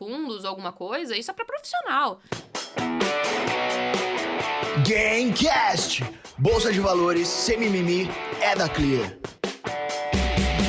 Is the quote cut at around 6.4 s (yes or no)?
no